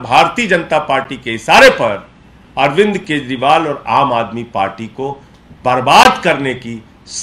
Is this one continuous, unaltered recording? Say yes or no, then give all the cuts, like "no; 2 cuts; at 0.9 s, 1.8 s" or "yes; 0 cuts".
yes; 0 cuts